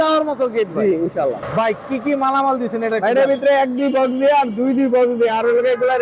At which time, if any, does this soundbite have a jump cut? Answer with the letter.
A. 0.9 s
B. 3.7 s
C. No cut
A